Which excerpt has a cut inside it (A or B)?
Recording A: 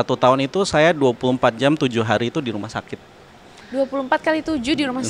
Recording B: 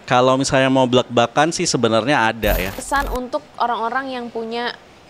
B